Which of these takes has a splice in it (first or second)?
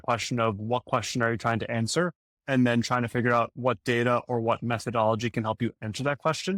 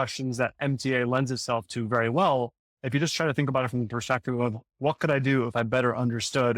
second